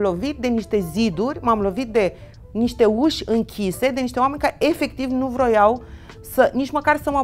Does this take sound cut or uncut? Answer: uncut